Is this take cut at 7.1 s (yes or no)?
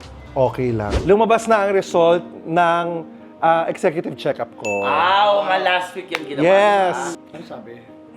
yes